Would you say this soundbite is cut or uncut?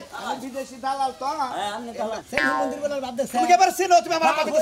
cut